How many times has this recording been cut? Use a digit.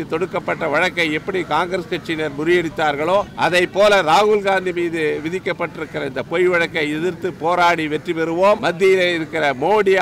2